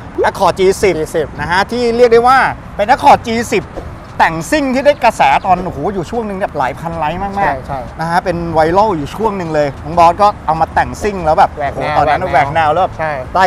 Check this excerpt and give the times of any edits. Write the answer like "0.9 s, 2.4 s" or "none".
none